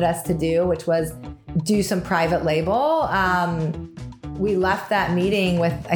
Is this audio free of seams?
no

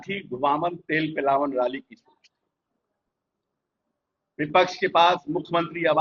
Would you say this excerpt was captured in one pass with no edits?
yes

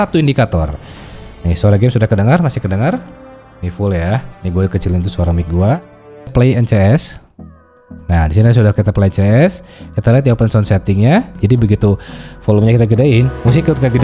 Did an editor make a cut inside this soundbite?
yes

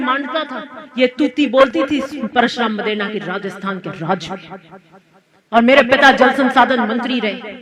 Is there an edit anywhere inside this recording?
no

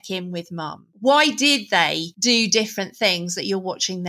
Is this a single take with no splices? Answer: no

